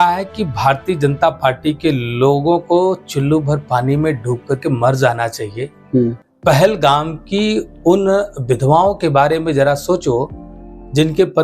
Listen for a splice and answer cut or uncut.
uncut